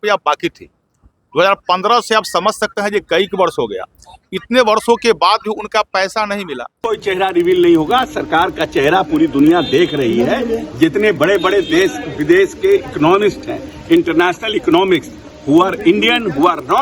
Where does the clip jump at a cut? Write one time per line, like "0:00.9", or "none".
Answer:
0:06.7